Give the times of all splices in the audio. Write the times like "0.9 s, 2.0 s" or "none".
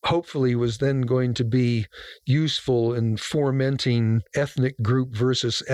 4.2 s